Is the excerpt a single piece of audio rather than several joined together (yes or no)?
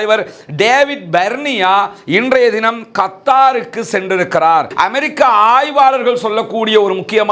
no